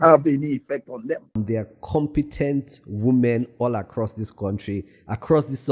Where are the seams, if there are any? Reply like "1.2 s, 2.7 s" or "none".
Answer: 1.3 s